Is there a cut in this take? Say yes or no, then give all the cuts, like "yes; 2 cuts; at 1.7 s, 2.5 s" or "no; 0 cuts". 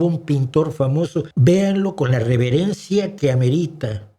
yes; 1 cut; at 1.3 s